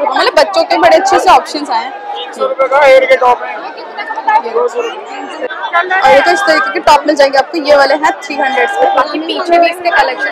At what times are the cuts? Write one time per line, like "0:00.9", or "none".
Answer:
none